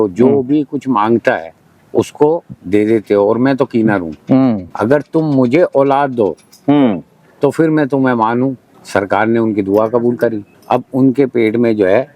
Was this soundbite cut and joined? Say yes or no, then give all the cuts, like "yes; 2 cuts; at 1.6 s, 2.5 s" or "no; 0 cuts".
yes; 3 cuts; at 4.7 s, 8.7 s, 10.5 s